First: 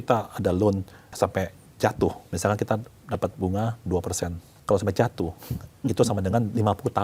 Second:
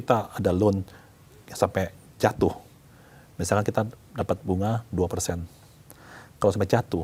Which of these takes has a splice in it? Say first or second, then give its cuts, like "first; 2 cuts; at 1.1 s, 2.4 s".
first; 3 cuts; at 1.0 s, 2.3 s, 4.5 s